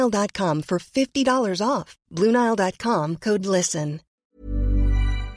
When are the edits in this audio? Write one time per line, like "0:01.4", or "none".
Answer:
0:04.2